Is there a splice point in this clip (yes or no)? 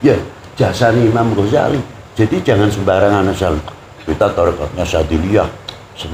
no